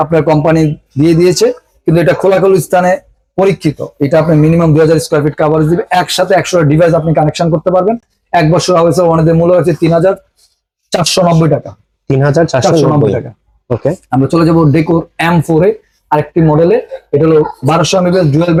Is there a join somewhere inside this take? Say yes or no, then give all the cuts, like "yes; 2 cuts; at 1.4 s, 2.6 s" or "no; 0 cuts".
no; 0 cuts